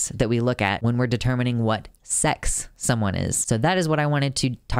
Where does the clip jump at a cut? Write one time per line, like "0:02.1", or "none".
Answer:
0:00.8
0:03.4

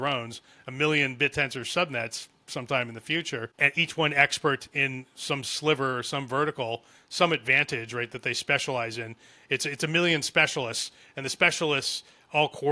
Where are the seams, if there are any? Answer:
0:03.5

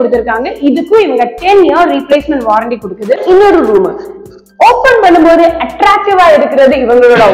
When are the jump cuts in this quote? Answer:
0:03.2

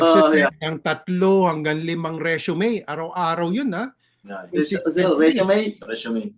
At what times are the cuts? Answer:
none

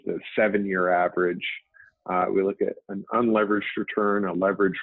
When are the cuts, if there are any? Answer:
none

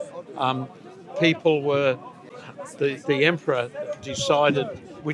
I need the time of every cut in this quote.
0:02.1

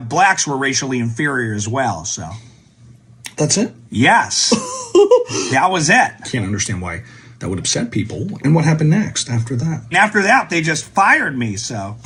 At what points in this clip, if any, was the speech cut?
none

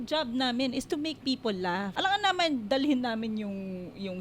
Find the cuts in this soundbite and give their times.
0:01.9

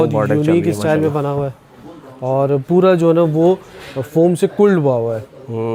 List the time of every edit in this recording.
none

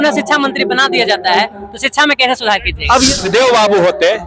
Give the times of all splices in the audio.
0:03.1

